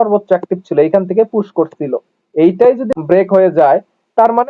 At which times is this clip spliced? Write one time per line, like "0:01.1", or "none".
0:02.9